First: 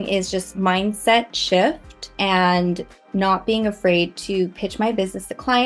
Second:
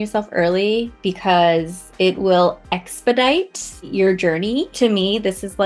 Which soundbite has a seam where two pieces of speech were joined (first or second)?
second